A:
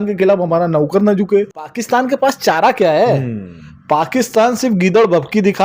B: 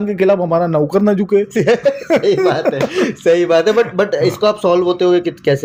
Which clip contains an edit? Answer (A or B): A